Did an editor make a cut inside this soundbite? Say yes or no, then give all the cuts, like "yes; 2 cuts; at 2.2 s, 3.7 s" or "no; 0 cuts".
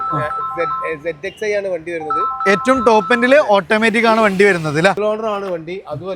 yes; 1 cut; at 5.0 s